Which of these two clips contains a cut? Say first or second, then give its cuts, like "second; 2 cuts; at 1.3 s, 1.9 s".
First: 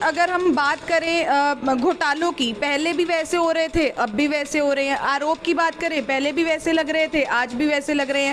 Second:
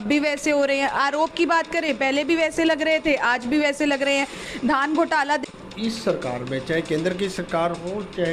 second; 1 cut; at 5.4 s